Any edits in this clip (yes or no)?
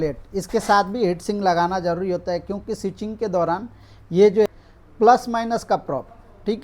yes